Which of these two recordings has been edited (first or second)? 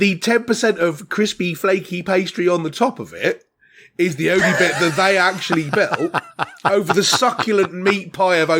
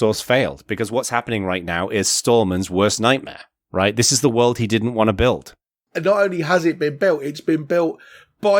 second